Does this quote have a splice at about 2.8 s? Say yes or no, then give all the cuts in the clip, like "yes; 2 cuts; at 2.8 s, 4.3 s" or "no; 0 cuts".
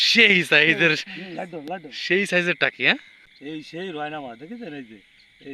yes; 1 cut; at 2.8 s